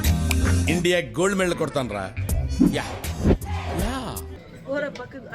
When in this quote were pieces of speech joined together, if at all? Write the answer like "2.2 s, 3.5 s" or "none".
none